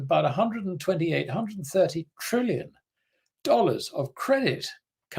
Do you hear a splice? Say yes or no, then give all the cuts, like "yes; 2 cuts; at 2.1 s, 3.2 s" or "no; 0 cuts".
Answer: no; 0 cuts